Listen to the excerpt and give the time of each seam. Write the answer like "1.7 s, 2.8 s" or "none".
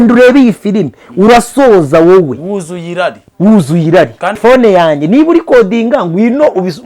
4.4 s